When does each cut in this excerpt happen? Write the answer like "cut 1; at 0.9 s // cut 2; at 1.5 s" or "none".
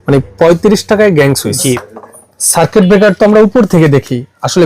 cut 1; at 1.8 s

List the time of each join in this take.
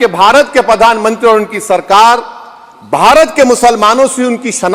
none

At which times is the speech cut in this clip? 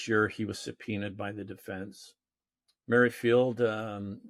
none

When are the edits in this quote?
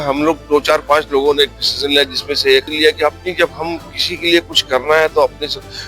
cut 1; at 2.7 s

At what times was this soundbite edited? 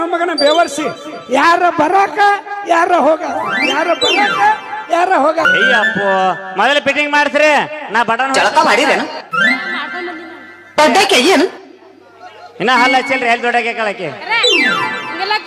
cut 1; at 5.5 s

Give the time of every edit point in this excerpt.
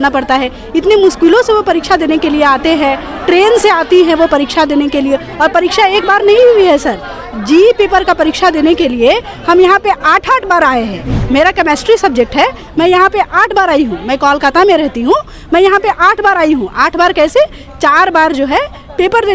none

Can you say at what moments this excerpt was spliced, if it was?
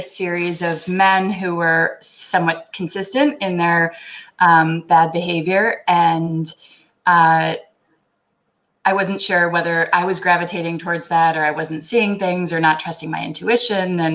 none

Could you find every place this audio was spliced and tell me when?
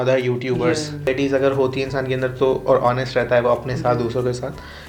cut 1; at 1.1 s

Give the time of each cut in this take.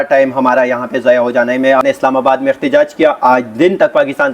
cut 1; at 1.8 s

